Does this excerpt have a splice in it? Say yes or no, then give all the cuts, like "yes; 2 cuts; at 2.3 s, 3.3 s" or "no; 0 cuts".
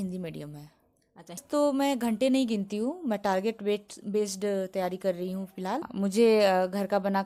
yes; 2 cuts; at 1.4 s, 5.9 s